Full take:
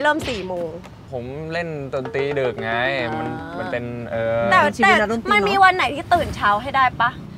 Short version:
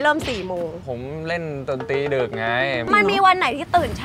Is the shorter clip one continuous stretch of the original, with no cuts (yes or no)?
no